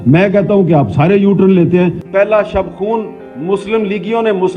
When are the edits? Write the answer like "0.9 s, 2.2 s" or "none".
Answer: 2.0 s